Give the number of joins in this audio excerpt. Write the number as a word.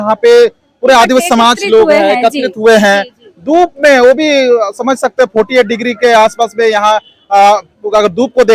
zero